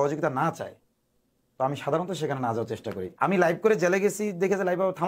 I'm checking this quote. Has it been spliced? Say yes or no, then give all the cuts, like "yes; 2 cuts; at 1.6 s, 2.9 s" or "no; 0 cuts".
yes; 1 cut; at 3.1 s